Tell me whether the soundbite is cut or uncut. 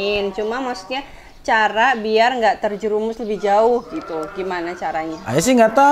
uncut